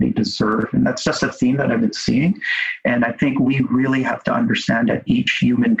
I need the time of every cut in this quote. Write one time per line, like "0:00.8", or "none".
none